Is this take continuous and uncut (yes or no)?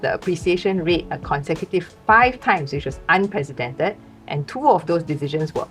yes